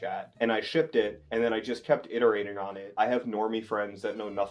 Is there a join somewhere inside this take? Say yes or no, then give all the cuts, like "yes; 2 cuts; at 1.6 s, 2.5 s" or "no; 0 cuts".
yes; 1 cut; at 2.8 s